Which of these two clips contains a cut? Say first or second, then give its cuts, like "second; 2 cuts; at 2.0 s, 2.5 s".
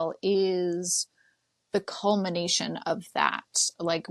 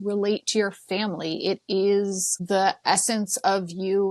second; 1 cut; at 2.4 s